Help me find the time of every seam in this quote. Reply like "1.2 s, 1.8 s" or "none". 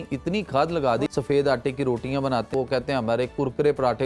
1.1 s, 2.5 s